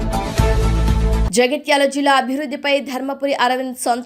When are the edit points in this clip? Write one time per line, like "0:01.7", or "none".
0:01.2